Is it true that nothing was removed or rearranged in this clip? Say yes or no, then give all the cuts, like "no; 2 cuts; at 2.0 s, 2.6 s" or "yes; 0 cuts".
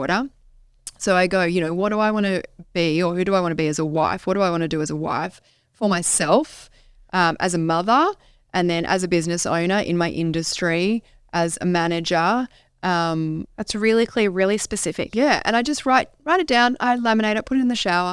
yes; 0 cuts